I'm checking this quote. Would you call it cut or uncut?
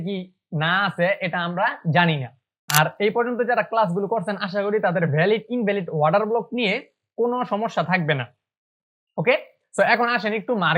cut